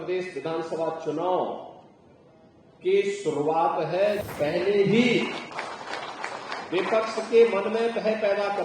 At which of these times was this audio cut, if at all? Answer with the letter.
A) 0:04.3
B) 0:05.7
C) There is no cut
A